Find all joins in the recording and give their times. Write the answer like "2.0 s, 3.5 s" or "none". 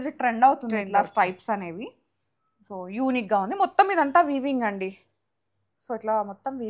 none